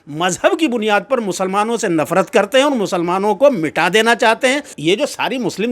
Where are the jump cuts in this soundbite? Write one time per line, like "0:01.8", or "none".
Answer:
0:04.7

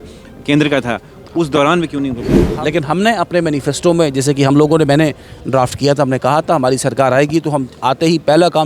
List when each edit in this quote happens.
0:02.4

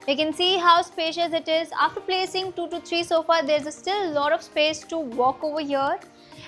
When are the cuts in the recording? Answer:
none

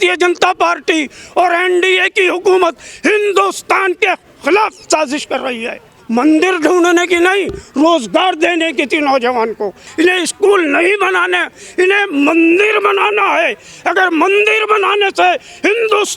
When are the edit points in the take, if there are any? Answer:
0:05.9
0:09.8

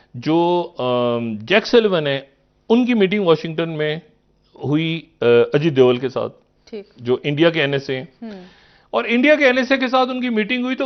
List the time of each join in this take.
none

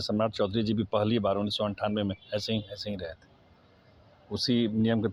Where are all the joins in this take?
none

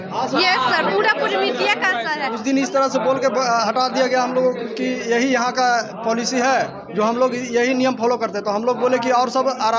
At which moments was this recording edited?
0:02.3

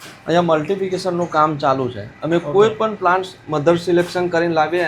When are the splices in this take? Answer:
none

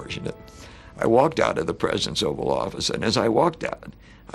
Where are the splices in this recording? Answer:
none

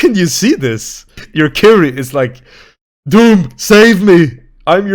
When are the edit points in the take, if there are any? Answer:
0:01.2

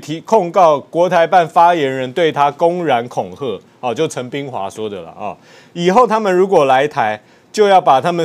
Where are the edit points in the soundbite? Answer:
none

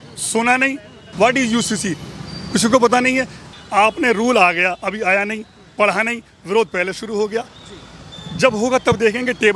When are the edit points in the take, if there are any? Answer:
0:01.1
0:03.5

